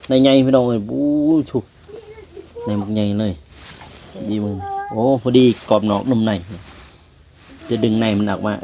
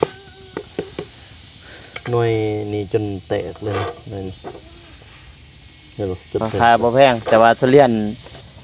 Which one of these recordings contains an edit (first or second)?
second